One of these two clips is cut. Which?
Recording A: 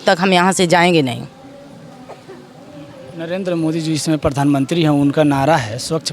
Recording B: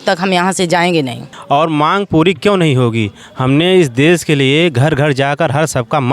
B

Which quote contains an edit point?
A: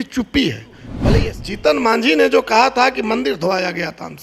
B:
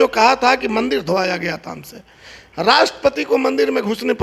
A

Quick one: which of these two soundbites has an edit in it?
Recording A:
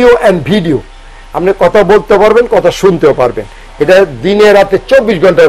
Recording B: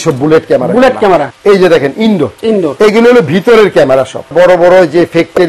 B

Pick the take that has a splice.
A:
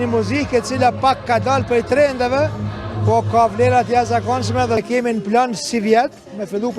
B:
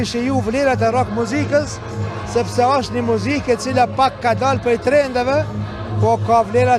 A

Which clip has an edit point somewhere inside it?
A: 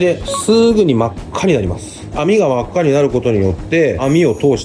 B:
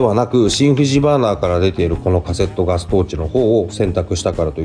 A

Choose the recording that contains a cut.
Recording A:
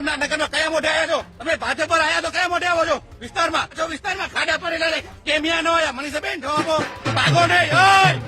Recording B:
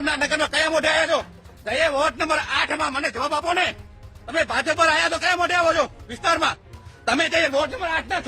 A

